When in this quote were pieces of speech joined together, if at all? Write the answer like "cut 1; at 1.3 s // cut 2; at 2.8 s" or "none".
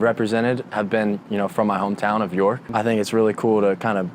cut 1; at 2.6 s